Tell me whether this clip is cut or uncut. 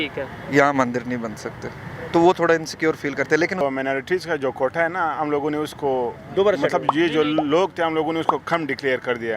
cut